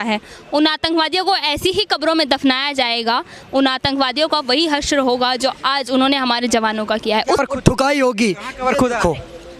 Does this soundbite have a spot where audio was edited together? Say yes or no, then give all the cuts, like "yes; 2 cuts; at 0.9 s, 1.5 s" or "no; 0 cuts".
yes; 1 cut; at 7.4 s